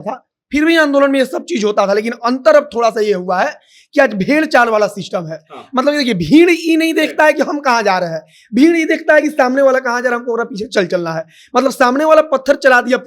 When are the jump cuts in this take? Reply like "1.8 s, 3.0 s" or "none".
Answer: none